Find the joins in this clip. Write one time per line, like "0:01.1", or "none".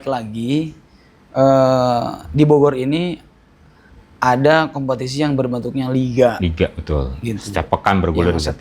none